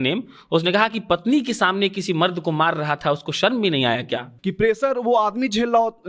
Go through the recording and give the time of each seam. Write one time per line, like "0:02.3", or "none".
0:04.3